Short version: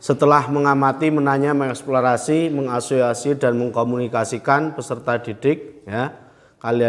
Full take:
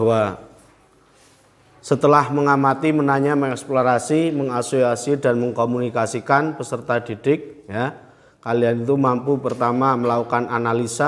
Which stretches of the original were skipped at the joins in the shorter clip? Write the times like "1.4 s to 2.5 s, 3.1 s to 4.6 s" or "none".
none